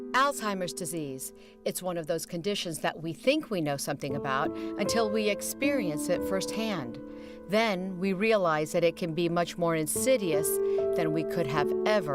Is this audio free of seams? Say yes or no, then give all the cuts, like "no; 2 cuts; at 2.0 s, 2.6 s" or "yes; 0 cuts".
yes; 0 cuts